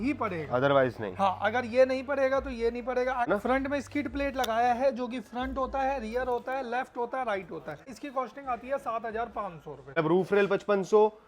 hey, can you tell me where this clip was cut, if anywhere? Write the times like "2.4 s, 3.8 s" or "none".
3.3 s, 8.0 s, 10.0 s